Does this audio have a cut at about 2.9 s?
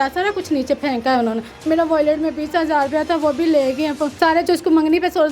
no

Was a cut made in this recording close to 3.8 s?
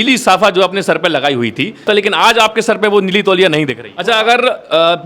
yes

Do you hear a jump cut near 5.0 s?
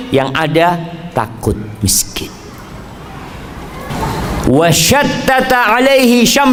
no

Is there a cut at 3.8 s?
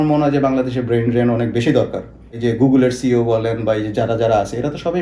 no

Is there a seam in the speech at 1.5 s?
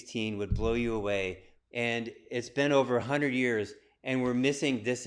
yes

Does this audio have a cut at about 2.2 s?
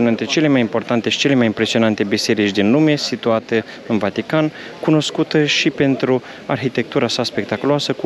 no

